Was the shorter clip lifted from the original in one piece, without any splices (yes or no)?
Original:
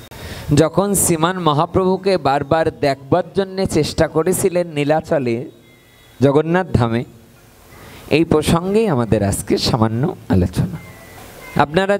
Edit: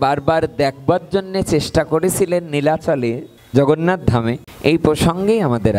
no